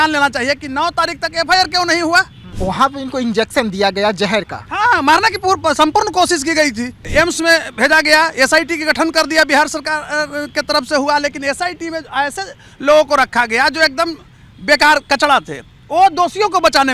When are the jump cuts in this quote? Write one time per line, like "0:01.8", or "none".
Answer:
0:02.4
0:07.0